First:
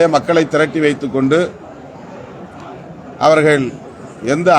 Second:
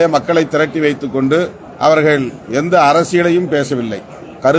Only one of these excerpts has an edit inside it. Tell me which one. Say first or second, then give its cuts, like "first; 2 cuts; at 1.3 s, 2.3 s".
second; 2 cuts; at 1.6 s, 2.4 s